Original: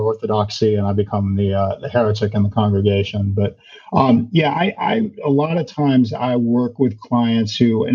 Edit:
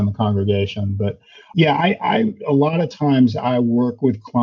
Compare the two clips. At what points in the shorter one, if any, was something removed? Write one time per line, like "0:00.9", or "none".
0:01.5